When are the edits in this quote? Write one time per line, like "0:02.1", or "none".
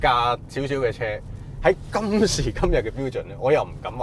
none